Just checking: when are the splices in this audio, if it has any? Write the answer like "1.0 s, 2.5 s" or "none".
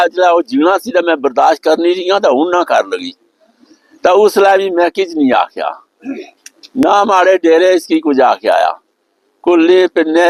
none